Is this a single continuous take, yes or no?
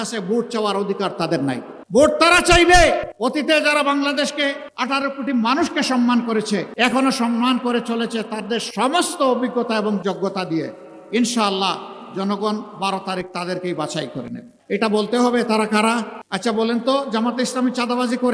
no